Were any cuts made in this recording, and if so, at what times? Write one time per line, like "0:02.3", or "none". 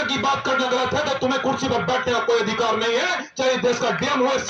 none